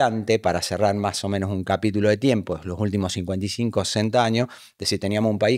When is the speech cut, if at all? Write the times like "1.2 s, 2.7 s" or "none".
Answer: none